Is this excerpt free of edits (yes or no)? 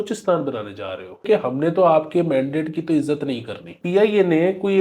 no